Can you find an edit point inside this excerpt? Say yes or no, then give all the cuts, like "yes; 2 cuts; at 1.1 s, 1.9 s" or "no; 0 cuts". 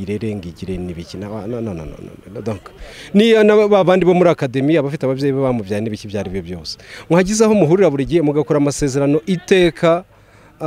no; 0 cuts